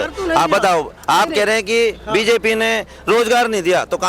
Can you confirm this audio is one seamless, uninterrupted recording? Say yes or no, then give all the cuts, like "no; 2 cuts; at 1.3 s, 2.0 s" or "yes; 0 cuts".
yes; 0 cuts